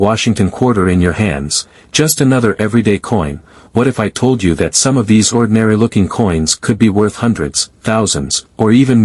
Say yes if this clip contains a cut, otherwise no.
no